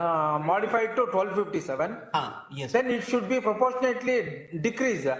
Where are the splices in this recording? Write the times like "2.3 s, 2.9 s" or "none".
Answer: none